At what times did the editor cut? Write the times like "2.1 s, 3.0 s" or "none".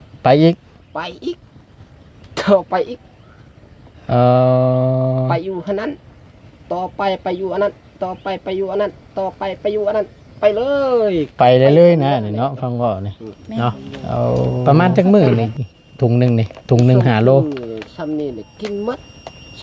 14.6 s